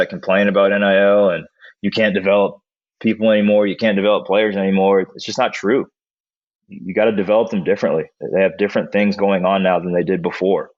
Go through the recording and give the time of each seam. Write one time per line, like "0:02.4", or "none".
none